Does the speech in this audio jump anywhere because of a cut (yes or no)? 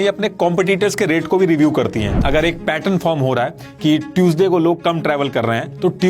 yes